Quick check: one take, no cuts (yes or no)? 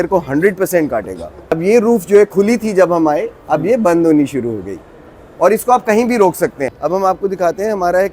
no